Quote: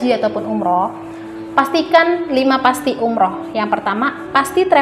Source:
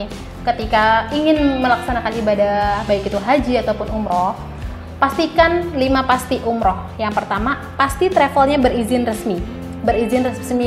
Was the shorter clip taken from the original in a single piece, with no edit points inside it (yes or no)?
yes